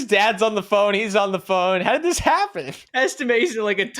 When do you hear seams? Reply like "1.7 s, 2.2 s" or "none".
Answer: 2.8 s